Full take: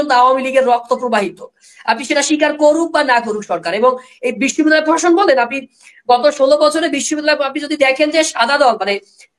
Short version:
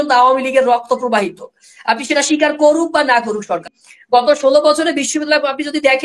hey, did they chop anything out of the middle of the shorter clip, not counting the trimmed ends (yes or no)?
yes